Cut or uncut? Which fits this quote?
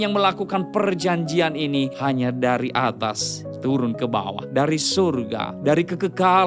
cut